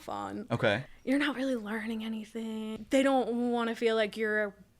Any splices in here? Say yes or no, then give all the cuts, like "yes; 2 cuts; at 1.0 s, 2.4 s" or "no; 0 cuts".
yes; 2 cuts; at 0.8 s, 2.7 s